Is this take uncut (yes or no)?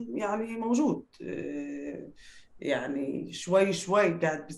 yes